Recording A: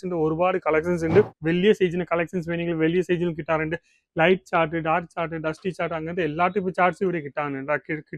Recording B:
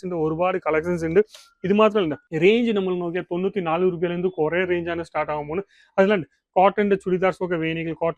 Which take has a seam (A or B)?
A